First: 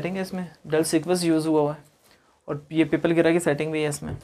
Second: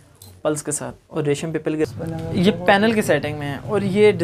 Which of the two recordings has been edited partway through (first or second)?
second